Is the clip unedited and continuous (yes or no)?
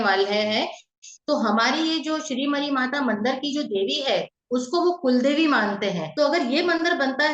no